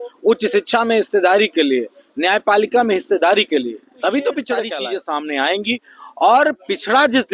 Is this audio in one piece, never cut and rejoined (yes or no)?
no